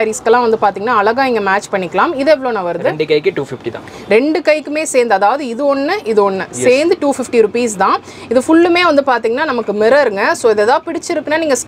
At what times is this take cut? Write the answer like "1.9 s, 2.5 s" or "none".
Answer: none